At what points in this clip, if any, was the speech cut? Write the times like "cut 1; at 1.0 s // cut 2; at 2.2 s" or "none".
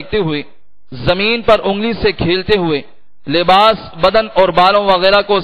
none